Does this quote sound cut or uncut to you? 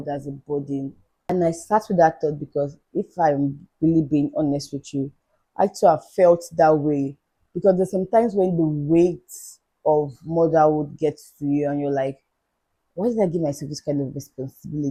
uncut